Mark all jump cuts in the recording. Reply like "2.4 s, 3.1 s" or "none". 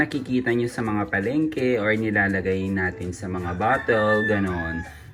none